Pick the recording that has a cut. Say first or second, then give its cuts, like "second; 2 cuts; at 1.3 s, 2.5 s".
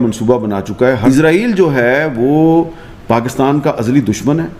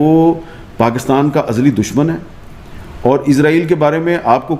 first; 1 cut; at 1.0 s